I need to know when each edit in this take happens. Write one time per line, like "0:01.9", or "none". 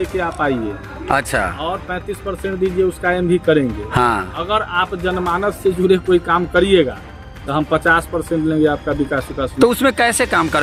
none